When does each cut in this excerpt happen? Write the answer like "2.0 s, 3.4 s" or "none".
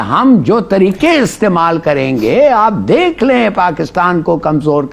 none